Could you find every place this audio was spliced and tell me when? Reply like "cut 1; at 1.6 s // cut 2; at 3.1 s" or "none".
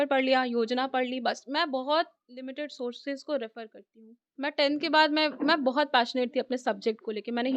cut 1; at 4.2 s